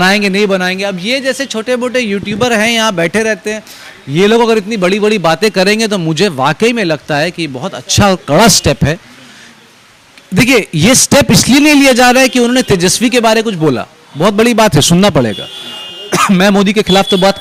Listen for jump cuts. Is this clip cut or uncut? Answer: uncut